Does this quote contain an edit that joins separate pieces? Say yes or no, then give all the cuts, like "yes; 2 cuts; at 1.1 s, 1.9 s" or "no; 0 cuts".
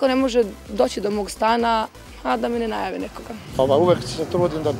yes; 1 cut; at 3.6 s